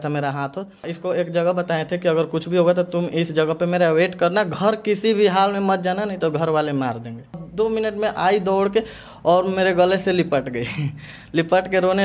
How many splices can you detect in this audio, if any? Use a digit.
2